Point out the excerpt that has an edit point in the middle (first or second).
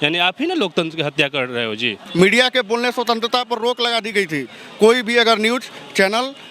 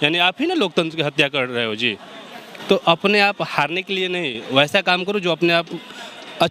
first